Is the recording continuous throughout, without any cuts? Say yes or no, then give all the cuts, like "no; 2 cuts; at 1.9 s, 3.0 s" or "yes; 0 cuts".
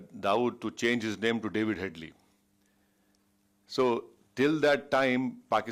yes; 0 cuts